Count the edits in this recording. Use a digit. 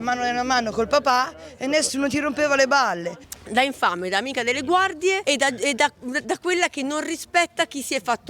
2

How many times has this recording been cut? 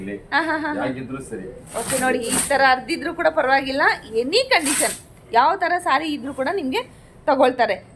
0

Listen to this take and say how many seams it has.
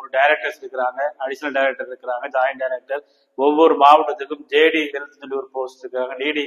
0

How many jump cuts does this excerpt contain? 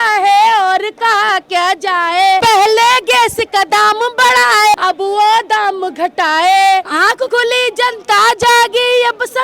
3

